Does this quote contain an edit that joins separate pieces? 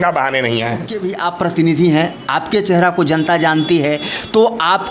yes; 1 cut; at 1.1 s

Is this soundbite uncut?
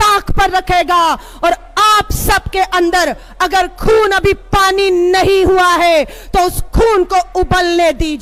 yes; 0 cuts

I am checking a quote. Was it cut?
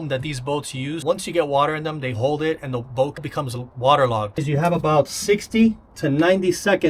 yes; 4 cuts; at 1.0 s, 3.3 s, 4.4 s, 5.9 s

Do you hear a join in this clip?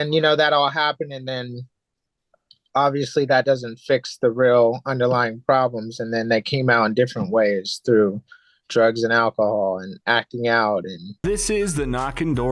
yes; 1 cut; at 11.1 s

